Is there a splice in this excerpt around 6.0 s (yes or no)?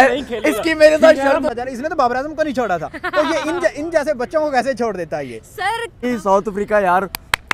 yes